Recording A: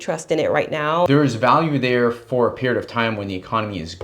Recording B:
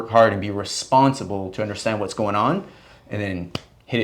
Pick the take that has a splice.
A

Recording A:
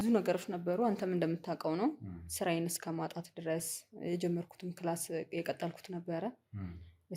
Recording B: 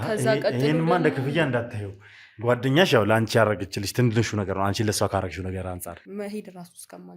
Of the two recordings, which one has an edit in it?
B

